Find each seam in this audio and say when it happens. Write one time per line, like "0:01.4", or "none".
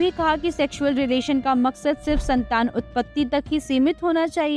none